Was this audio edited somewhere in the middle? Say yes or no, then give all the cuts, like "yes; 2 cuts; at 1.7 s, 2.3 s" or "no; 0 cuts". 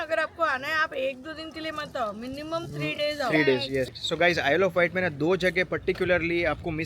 yes; 1 cut; at 3.9 s